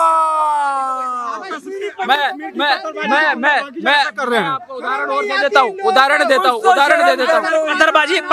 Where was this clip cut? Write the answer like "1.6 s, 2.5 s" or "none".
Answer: none